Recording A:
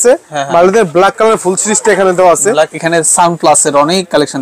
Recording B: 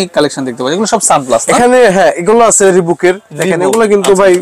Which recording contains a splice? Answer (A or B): A